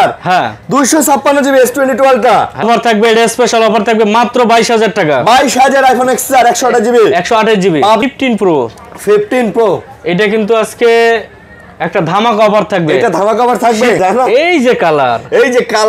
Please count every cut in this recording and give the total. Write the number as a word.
three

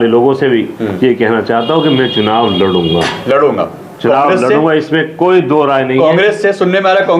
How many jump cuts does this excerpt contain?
zero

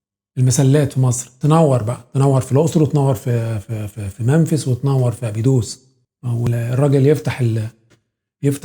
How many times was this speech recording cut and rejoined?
one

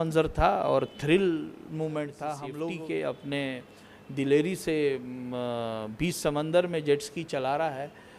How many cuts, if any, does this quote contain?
one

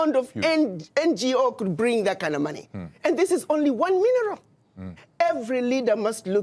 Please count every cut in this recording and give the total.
one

